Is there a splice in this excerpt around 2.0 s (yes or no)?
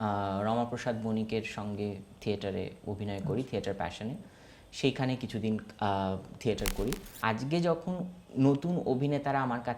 no